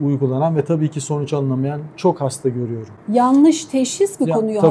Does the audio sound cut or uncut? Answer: uncut